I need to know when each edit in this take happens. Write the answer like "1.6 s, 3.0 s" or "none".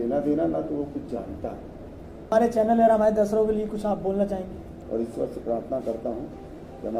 2.3 s, 4.7 s

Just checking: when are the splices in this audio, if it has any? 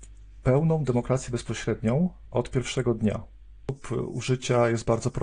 3.8 s

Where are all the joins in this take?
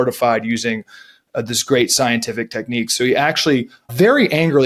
none

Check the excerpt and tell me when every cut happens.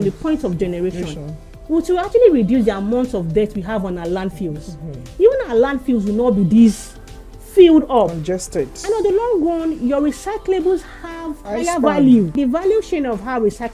11.4 s, 12.3 s

